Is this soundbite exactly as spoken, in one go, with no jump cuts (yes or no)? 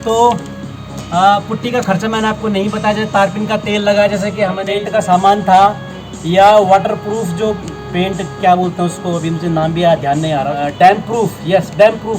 no